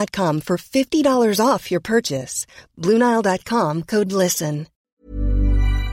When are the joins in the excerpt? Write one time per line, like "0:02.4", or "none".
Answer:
0:04.8